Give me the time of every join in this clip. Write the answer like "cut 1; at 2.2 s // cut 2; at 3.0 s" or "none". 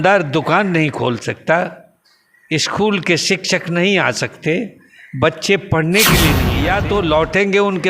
cut 1; at 6.5 s